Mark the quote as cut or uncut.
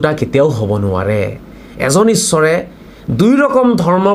cut